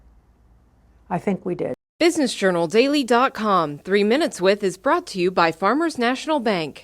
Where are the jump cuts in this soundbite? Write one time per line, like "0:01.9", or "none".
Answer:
0:01.8